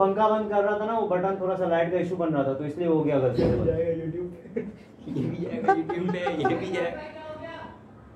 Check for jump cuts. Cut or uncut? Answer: uncut